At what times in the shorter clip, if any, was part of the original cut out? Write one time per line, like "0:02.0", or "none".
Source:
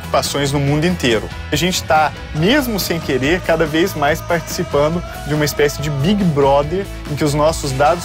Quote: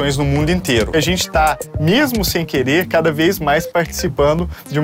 0:00.9